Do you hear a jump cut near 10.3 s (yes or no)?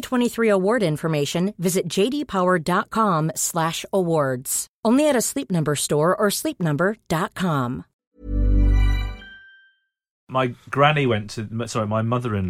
yes